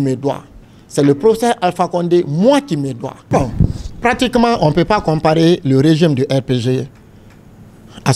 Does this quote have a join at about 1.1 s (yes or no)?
no